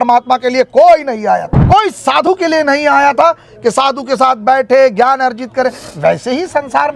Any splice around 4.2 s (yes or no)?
no